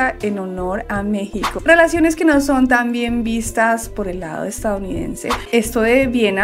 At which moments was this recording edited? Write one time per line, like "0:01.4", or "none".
0:01.6
0:05.4